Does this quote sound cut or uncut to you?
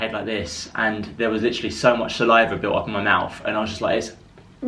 uncut